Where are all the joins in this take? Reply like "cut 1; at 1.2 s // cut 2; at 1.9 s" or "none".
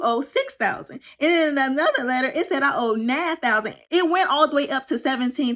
cut 1; at 3.7 s